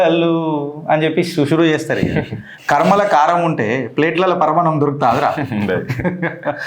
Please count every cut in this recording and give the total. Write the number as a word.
one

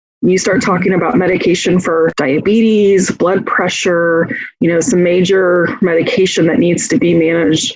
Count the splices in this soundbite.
one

